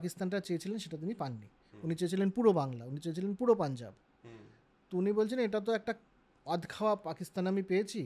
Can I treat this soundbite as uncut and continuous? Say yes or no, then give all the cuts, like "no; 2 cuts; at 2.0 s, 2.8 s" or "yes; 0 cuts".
yes; 0 cuts